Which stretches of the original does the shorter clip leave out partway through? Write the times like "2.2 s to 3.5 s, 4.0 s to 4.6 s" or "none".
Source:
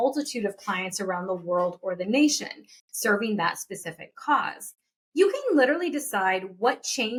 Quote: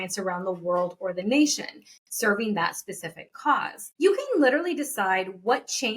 4.6 s to 5.0 s